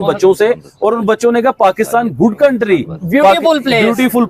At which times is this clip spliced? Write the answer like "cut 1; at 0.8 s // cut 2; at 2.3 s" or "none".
cut 1; at 2.6 s